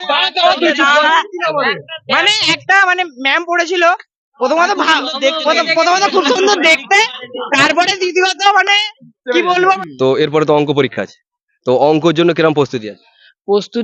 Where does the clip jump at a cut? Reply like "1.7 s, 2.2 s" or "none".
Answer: 9.8 s